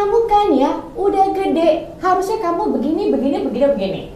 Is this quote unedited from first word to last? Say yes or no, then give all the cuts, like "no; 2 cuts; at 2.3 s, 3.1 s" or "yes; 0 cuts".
yes; 0 cuts